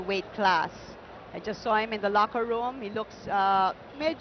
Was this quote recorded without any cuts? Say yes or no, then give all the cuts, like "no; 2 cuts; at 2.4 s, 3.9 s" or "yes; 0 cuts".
yes; 0 cuts